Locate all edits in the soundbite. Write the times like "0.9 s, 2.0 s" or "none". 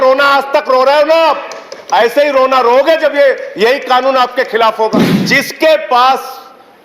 5.1 s